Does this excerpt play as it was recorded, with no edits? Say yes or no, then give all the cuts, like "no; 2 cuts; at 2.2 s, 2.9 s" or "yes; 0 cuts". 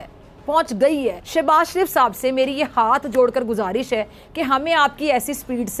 yes; 0 cuts